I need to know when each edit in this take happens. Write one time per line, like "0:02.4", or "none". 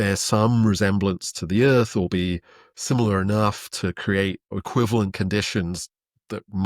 none